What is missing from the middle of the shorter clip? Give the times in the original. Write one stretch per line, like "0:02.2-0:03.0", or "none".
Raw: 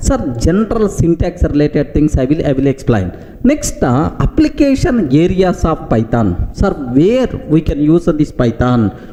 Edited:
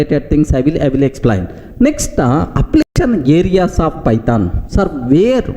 0:04.6-0:04.8